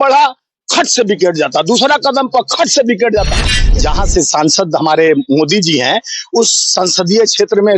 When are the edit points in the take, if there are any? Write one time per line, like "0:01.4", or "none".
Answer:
0:03.6